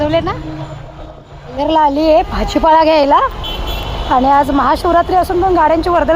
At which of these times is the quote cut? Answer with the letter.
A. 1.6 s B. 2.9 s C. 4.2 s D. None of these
A